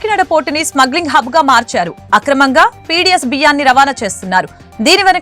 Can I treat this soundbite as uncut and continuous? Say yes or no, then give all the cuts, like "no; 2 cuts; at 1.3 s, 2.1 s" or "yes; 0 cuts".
yes; 0 cuts